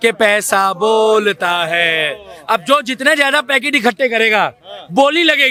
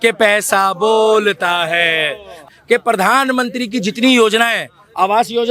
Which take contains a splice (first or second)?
second